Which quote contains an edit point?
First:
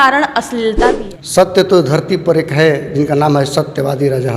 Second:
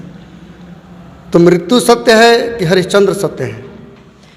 first; 1 cut; at 1.0 s

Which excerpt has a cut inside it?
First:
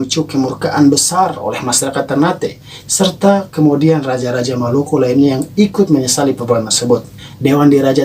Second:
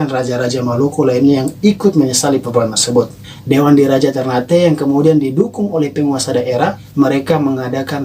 second; 1 cut; at 6.8 s

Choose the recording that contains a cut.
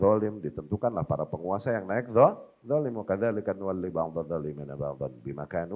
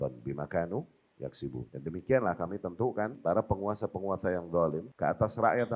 second; 3 cuts; at 1.7 s, 3.2 s, 4.9 s

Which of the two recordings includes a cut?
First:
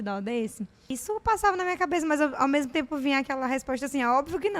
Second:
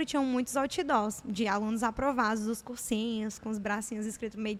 first; 1 cut; at 0.9 s

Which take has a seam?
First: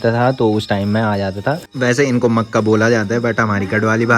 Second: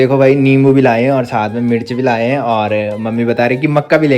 first; 1 cut; at 1.6 s

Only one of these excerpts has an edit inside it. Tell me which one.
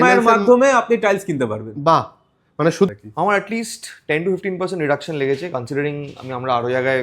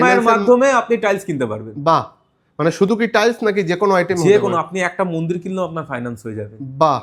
first; 1 cut; at 2.9 s

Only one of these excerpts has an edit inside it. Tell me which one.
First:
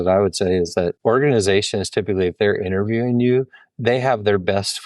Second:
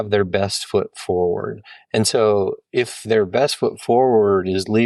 first; 1 cut; at 0.9 s

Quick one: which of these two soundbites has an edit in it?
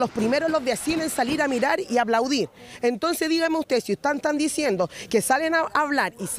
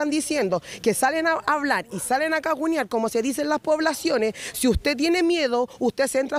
first; 1 cut; at 2.3 s

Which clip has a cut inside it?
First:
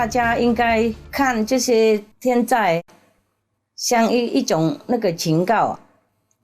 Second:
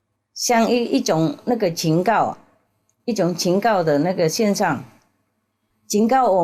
first; 2 cuts; at 1.0 s, 2.1 s

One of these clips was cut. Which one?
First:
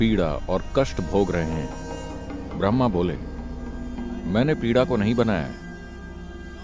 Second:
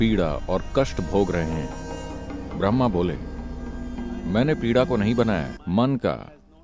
second; 1 cut; at 5.6 s

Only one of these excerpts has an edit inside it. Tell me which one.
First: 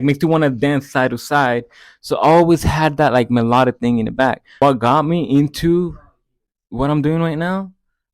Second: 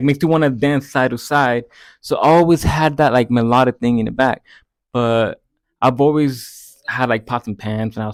first; 1 cut; at 4.5 s

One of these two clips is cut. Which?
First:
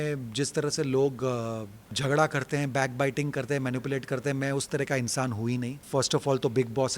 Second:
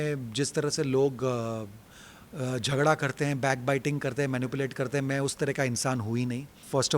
first; 2 cuts; at 1.9 s, 5.8 s

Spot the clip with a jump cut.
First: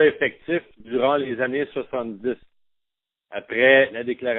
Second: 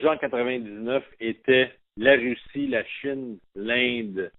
second; 1 cut; at 1.2 s

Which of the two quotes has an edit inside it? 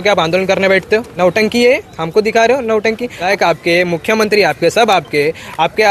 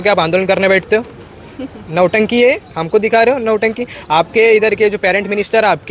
first; 2 cuts; at 1.1 s, 3.3 s

